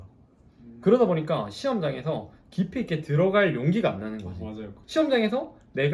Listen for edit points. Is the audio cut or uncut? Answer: cut